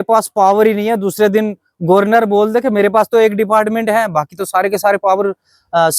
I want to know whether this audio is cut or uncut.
uncut